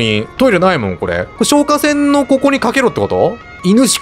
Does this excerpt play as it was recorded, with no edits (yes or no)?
no